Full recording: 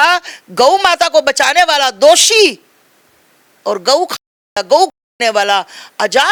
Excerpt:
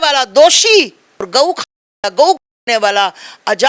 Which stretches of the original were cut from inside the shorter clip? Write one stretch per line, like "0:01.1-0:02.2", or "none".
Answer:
0:02.9-0:03.8

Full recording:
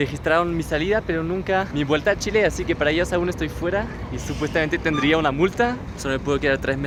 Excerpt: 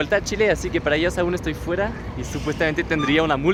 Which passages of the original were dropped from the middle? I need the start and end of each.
none

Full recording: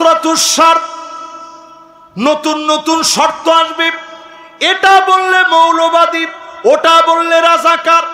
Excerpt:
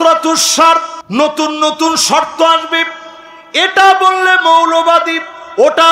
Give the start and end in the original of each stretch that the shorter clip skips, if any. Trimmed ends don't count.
0:00.9-0:02.0

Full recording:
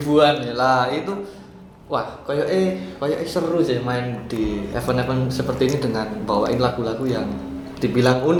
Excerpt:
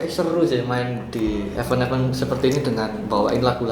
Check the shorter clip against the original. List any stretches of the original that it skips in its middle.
none

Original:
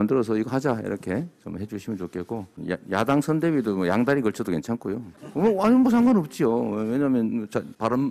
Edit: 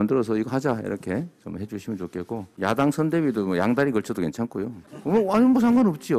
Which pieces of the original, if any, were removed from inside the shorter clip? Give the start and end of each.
0:02.5-0:02.8

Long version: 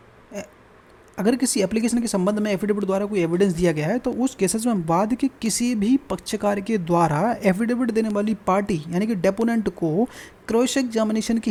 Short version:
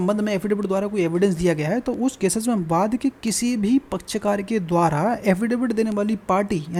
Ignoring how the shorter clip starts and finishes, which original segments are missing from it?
none

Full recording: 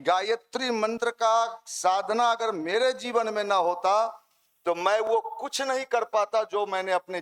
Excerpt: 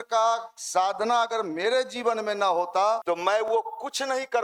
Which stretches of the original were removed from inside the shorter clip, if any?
0:04.1-0:04.6

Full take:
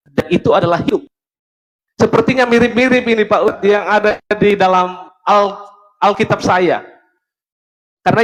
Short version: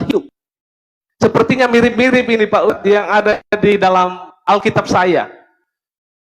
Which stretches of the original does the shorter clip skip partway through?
0:05.0-0:05.8

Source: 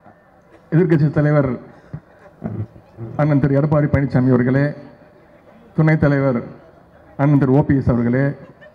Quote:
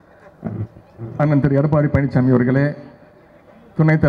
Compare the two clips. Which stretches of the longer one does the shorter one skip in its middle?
none

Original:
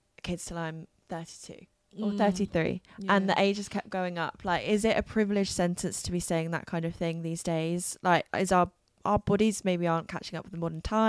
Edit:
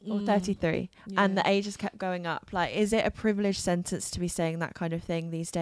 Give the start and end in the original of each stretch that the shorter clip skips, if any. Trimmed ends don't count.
none

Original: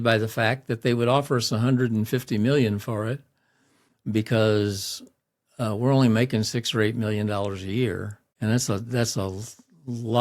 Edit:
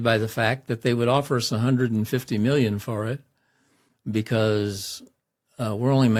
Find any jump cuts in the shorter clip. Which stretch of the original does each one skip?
none

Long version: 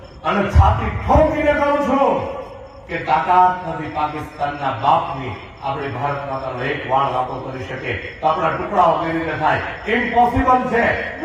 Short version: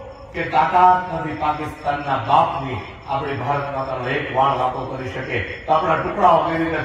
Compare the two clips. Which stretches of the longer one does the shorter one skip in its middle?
none

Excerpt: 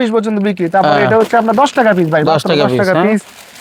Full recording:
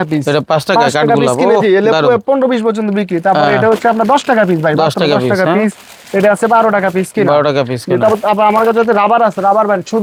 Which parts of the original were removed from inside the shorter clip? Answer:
none

